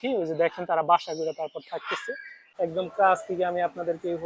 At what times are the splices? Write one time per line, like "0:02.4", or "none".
0:02.4